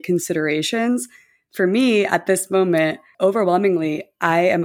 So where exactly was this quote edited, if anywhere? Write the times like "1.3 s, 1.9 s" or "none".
3.1 s

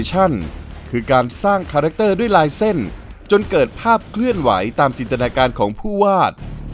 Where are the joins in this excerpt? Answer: none

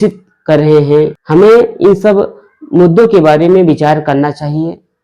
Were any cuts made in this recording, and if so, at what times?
1.2 s

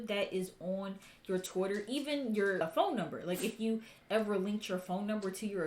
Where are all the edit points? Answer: 2.6 s

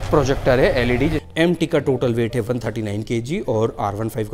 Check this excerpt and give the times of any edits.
1.2 s

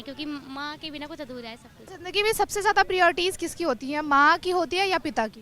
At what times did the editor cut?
1.9 s

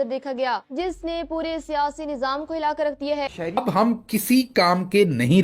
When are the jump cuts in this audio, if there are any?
3.6 s

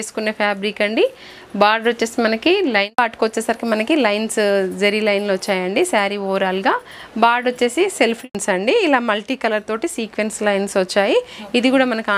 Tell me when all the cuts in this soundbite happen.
2.9 s, 8.2 s

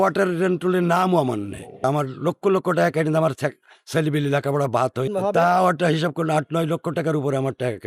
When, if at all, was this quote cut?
none

